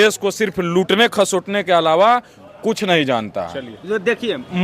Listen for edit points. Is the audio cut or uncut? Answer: uncut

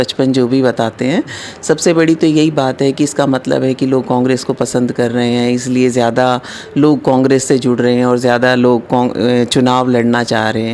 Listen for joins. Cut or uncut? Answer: uncut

